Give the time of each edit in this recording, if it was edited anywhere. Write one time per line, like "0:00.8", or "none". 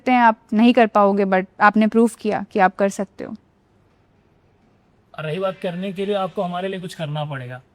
0:01.5